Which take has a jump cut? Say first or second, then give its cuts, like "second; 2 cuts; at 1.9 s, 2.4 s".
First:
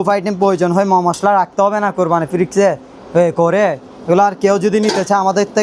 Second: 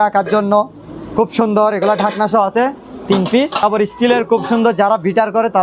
second; 1 cut; at 3.6 s